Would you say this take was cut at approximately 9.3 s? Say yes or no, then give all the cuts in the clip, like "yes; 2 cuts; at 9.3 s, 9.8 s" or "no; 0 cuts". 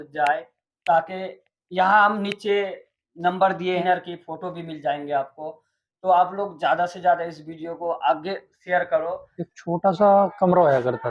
yes; 2 cuts; at 3.8 s, 9.3 s